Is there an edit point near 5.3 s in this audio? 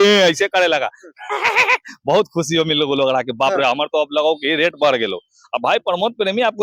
no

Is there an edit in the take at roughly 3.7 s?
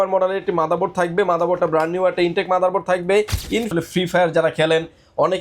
yes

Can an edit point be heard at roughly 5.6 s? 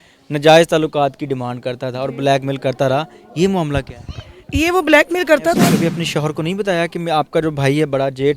yes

